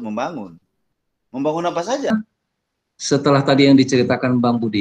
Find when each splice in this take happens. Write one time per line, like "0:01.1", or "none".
0:02.1